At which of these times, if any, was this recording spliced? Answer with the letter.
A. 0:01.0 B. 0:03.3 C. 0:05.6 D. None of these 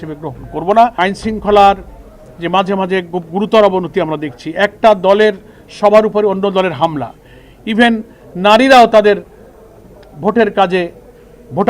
A